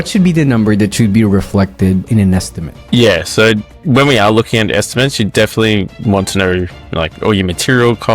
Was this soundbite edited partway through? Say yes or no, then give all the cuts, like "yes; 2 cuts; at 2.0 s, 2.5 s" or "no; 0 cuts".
yes; 1 cut; at 2.1 s